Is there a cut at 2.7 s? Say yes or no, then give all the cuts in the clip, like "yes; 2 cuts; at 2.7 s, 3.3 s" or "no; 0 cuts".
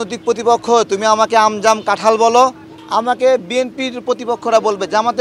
yes; 1 cut; at 2.7 s